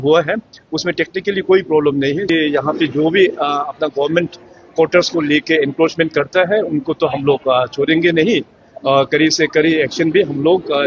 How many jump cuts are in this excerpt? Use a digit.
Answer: 1